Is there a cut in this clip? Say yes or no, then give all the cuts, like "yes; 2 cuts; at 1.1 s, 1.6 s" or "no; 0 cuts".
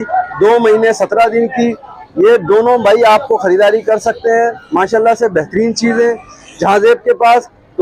no; 0 cuts